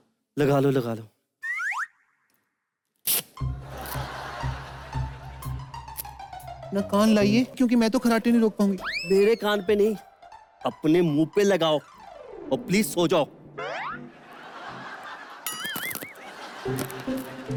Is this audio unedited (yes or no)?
yes